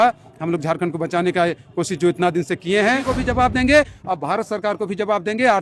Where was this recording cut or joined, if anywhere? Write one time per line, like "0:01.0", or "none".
0:03.1